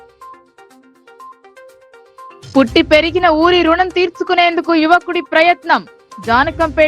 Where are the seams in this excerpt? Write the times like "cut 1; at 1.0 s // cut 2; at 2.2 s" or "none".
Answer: cut 1; at 1.7 s